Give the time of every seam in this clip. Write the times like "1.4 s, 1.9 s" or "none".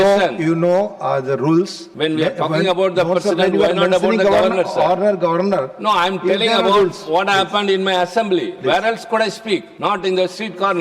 1.8 s, 9.7 s